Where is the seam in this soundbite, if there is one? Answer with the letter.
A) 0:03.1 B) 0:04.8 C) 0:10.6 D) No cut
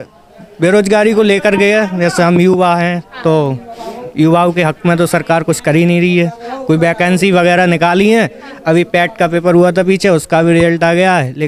D